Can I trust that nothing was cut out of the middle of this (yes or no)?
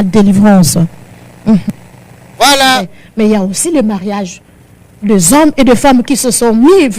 no